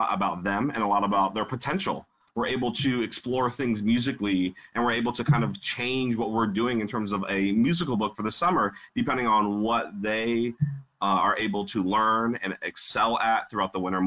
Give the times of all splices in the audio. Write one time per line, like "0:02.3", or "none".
0:02.2